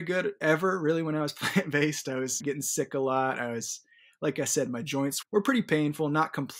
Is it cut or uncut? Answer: cut